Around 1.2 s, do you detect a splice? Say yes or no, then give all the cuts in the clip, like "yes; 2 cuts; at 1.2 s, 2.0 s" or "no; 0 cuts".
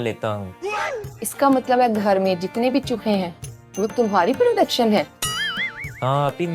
no; 0 cuts